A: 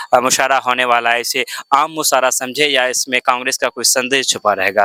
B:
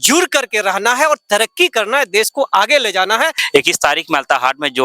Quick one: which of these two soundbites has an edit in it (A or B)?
B